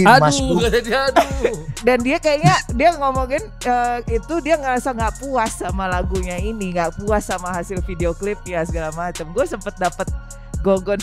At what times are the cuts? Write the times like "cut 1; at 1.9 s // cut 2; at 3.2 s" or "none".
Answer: cut 1; at 1.7 s

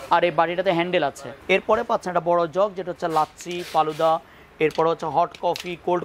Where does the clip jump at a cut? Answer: cut 1; at 1.3 s

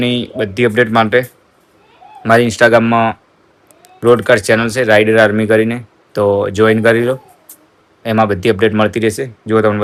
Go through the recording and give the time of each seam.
none

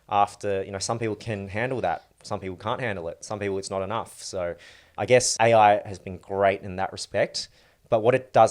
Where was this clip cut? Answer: cut 1; at 5.1 s

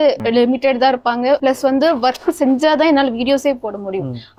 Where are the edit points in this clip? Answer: none

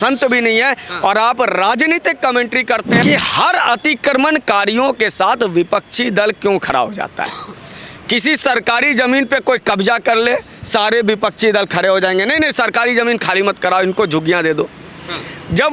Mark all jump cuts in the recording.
cut 1; at 3.0 s

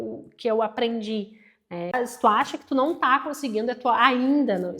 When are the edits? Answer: cut 1; at 1.9 s

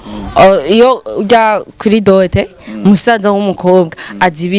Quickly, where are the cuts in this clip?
none

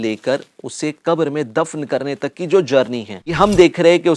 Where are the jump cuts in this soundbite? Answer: cut 1; at 3.2 s

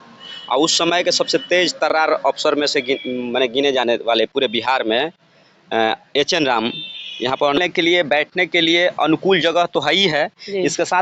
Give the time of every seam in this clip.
cut 1; at 7.6 s

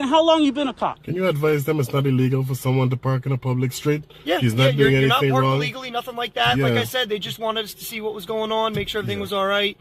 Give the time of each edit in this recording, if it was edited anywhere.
cut 1; at 1.0 s

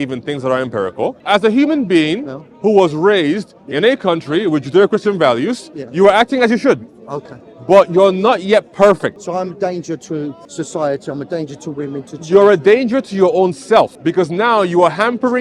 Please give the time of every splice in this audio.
cut 1; at 1.2 s // cut 2; at 9.2 s // cut 3; at 10.4 s // cut 4; at 13.9 s

